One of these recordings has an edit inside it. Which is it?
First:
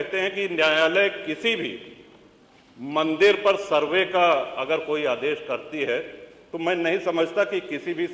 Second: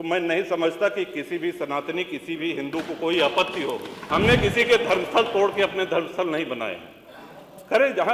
second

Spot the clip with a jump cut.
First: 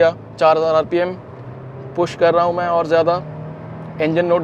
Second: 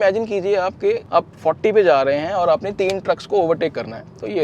second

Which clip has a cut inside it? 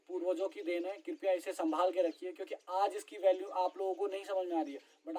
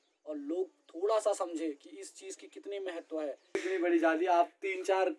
second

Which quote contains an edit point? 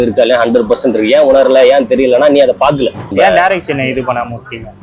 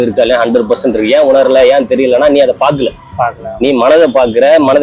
first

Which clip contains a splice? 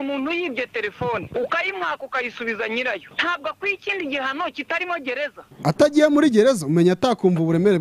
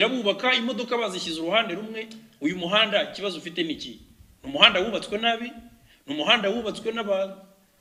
first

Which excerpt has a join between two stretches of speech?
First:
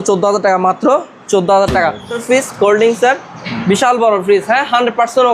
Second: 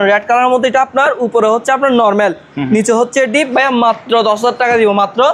first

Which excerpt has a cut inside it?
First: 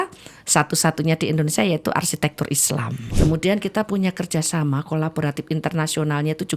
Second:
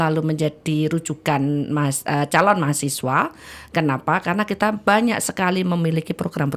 first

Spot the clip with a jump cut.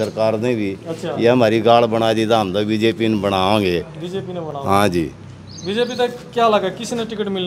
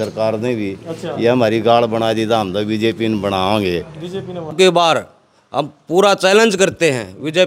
second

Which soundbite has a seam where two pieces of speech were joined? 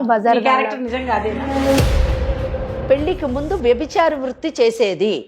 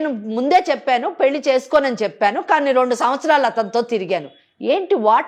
first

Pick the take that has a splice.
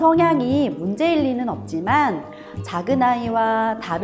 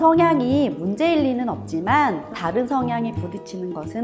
second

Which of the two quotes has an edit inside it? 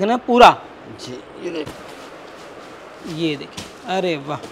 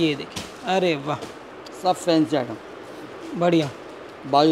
first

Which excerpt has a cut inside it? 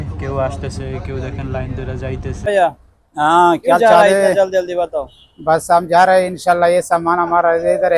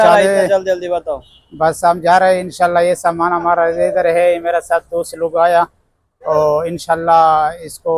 first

